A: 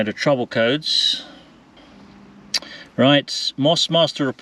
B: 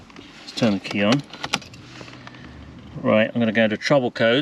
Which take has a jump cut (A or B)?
A